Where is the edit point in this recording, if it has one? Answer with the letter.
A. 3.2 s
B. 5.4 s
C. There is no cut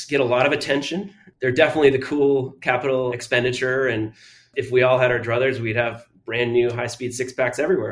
A